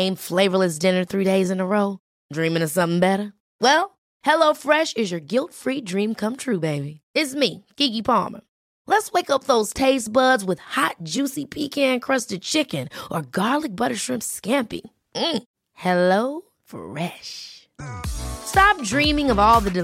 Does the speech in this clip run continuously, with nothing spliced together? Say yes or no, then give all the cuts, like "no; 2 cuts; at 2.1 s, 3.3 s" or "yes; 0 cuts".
yes; 0 cuts